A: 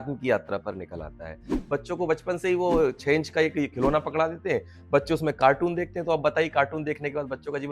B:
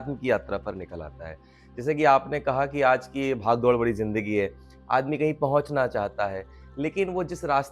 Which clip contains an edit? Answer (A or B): A